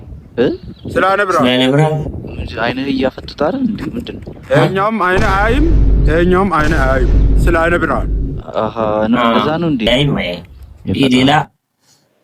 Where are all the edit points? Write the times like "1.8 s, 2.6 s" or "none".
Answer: 9.9 s